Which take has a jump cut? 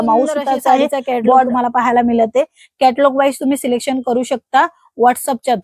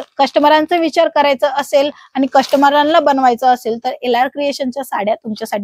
first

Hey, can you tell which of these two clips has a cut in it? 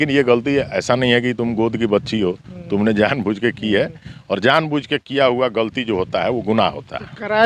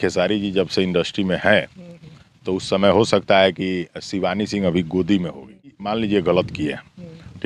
second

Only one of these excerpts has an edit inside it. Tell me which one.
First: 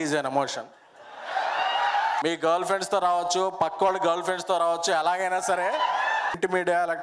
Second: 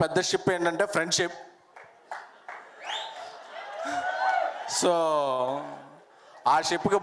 first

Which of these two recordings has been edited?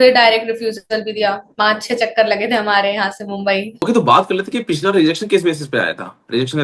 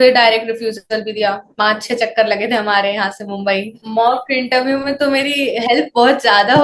second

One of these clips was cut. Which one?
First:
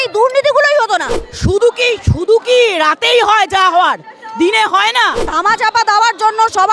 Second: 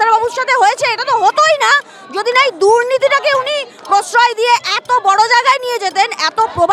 first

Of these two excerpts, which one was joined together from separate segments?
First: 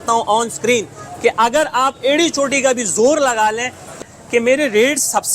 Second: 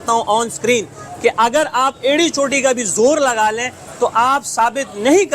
first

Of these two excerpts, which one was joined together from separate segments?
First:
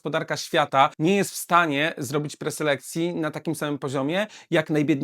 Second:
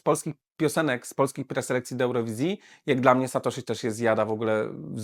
first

